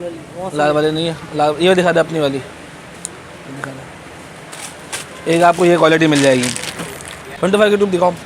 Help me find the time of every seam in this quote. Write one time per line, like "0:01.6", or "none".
0:07.3

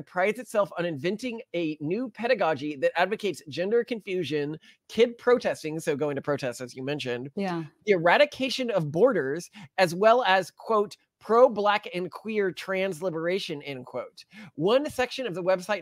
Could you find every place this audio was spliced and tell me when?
none

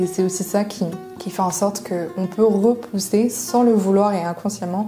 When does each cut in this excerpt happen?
none

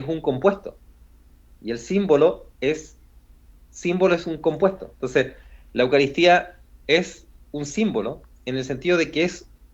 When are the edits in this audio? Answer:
none

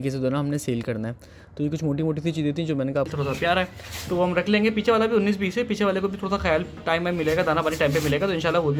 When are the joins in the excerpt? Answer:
0:03.1

